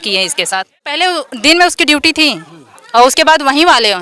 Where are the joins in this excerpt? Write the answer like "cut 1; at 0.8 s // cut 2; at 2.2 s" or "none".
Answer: cut 1; at 1.0 s

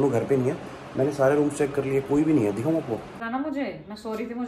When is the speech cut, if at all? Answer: cut 1; at 3.1 s

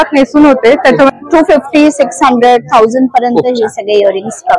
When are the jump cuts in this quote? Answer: cut 1; at 1.2 s

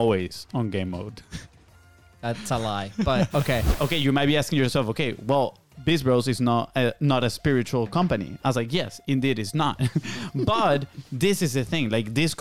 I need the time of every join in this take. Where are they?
cut 1; at 3.7 s

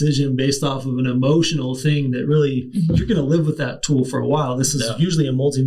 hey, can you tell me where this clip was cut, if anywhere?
cut 1; at 2.7 s

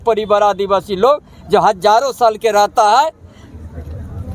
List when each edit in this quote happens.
none

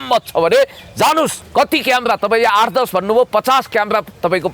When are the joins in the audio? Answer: cut 1; at 1.4 s

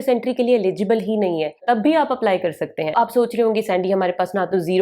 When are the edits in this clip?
cut 1; at 1.6 s // cut 2; at 2.9 s

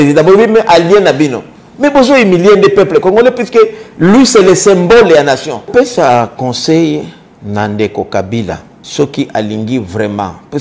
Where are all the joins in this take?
cut 1; at 5.5 s // cut 2; at 8.7 s

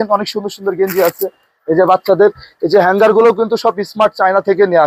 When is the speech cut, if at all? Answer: none

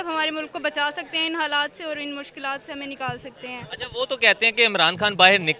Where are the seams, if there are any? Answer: none

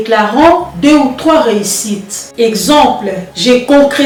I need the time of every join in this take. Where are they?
none

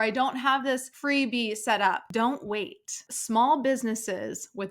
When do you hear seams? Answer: cut 1; at 0.9 s // cut 2; at 2.1 s // cut 3; at 3.1 s

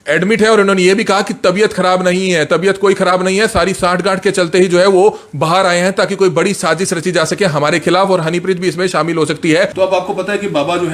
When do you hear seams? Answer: cut 1; at 9.7 s

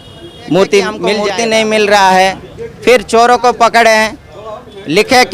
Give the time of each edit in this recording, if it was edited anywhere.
cut 1; at 1.2 s

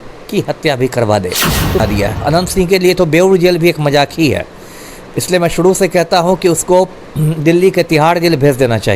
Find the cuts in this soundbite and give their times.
cut 1; at 1.8 s

